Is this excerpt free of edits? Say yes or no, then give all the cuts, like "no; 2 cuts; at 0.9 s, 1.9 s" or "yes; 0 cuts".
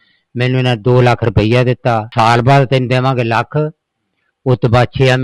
no; 1 cut; at 2.1 s